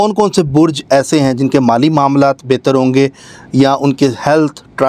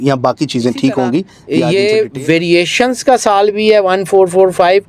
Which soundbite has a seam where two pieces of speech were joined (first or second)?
second